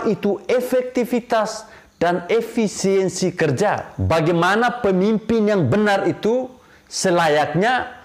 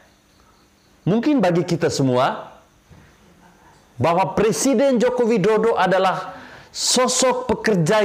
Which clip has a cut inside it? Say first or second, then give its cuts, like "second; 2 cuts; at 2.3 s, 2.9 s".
first; 1 cut; at 3.9 s